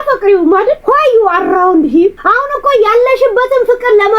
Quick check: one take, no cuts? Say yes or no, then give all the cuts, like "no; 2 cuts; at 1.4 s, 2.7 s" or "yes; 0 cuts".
no; 2 cuts; at 0.8 s, 2.2 s